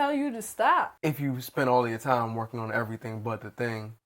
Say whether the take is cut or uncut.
cut